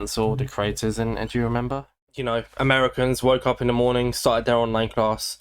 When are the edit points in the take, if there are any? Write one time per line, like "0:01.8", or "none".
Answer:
0:01.9